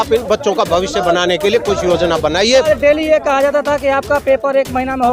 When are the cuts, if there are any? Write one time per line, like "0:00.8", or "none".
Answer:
0:02.7